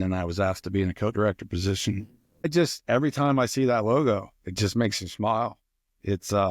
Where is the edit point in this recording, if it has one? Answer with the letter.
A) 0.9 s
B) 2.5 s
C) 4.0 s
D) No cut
B